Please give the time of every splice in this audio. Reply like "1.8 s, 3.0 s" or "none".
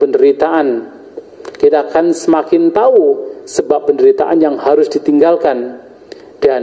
none